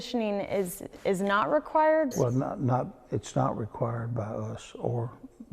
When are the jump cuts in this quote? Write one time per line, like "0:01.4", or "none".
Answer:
0:02.1